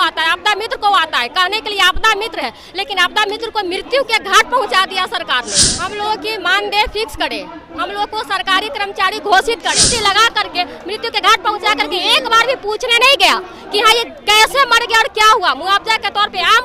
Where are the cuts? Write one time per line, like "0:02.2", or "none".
0:05.7
0:09.8